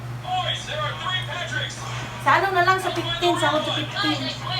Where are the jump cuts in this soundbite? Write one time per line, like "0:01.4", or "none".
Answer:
none